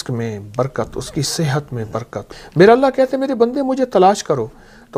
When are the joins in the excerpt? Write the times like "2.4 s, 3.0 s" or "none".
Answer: 2.3 s

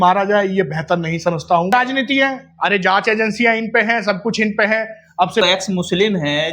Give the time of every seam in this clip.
1.7 s, 5.4 s

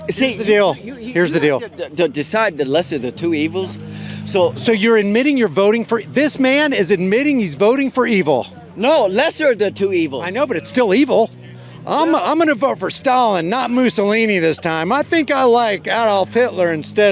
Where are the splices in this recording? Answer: none

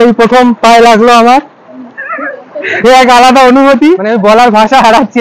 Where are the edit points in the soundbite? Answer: 4.0 s

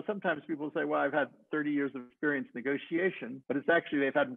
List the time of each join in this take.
none

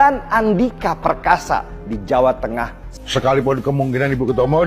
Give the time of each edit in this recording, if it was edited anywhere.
2.8 s

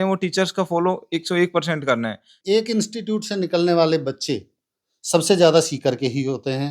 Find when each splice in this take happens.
2.3 s

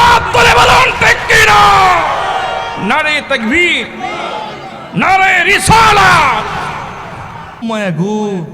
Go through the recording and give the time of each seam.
7.6 s

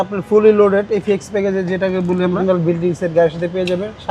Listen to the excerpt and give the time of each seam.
2.4 s

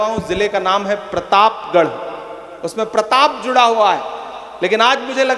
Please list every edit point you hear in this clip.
none

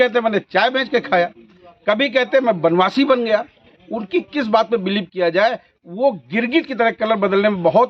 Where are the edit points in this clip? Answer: none

